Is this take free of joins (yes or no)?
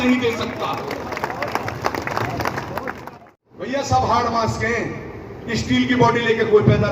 no